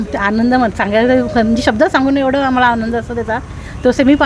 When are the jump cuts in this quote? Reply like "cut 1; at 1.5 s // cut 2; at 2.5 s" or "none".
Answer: none